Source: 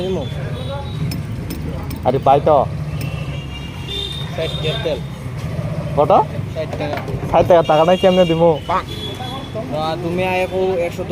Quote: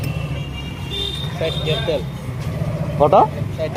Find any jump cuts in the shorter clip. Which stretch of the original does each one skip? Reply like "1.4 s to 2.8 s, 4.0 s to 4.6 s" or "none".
none